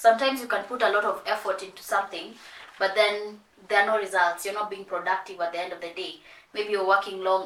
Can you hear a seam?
no; 0 cuts

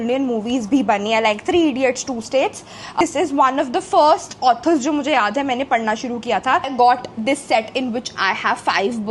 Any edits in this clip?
yes; 2 cuts; at 3.0 s, 6.7 s

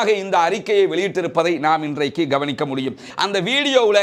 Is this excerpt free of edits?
no; 1 cut; at 3.1 s

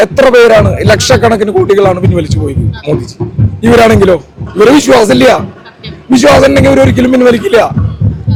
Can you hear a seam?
no; 0 cuts

